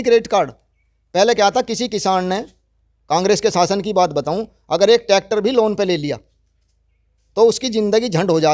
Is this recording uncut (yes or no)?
yes